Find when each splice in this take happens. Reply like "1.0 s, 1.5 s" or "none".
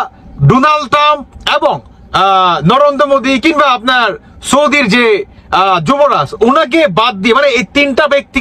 none